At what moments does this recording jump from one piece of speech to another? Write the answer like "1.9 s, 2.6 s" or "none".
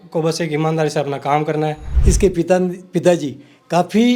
1.9 s